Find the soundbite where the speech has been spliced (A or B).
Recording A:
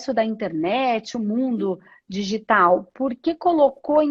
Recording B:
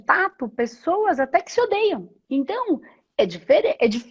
B